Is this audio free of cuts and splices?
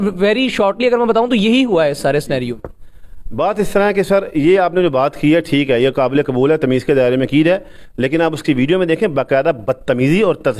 yes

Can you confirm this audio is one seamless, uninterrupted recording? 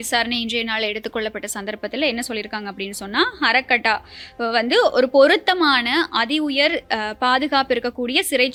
yes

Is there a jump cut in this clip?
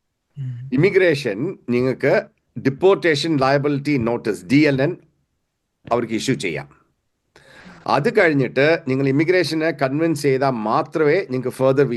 no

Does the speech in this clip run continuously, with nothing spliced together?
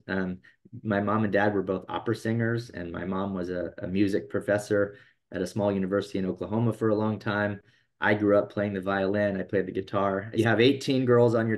no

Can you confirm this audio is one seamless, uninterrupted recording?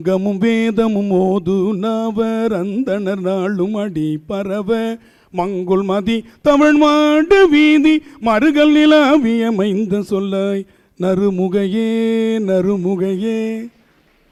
yes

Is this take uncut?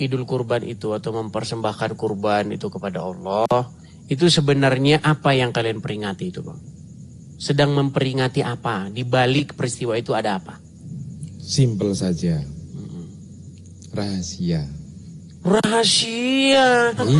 yes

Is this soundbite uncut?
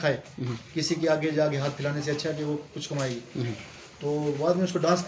yes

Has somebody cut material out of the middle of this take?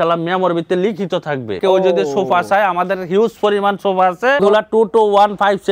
yes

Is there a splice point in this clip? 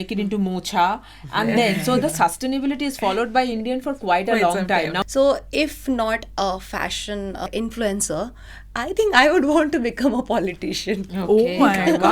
yes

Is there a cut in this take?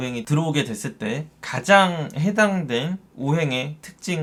no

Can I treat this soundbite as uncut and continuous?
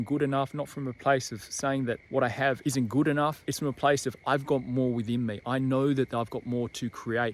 no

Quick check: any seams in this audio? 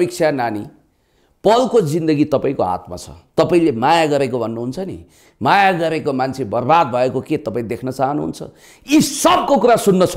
no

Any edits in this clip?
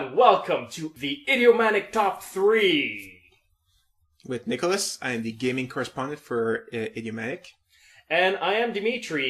no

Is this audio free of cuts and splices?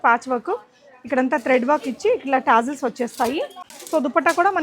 no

